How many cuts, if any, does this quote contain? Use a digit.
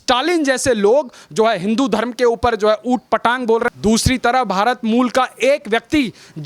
1